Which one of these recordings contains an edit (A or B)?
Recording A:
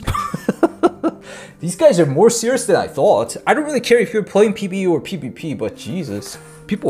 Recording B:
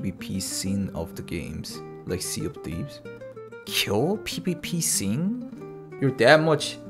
B